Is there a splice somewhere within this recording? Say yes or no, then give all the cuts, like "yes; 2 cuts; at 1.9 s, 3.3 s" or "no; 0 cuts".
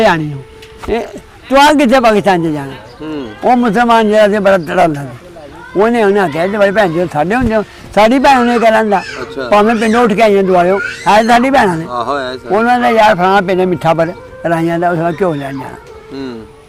no; 0 cuts